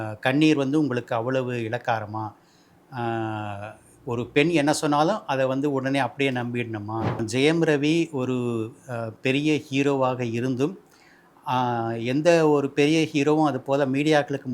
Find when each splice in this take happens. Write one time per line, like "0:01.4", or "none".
0:07.2

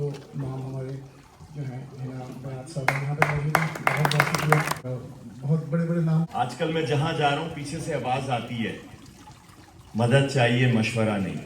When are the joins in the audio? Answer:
0:04.8
0:06.3

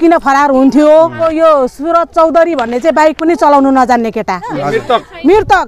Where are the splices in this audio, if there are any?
0:01.2
0:04.6

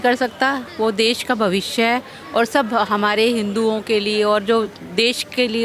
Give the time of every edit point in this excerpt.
none

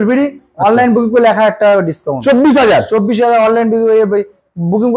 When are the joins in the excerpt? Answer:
none

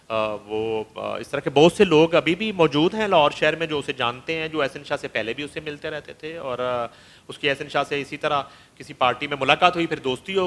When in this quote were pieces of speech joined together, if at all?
none

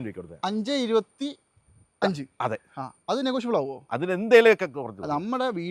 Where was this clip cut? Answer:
none

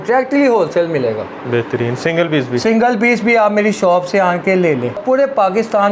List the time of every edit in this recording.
0:05.0

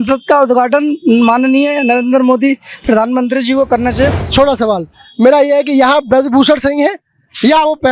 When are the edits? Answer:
0:04.1

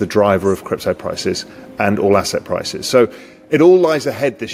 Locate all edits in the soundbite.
none

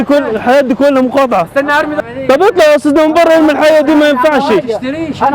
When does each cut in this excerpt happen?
0:01.9

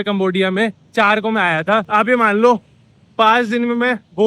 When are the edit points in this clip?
0:01.9

